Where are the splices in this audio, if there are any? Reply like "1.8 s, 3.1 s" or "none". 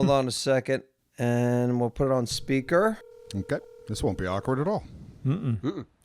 0.9 s